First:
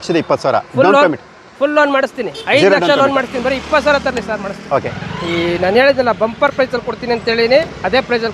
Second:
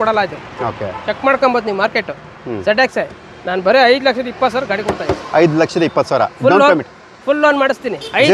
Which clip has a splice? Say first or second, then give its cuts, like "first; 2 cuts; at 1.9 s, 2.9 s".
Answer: first; 1 cut; at 4.6 s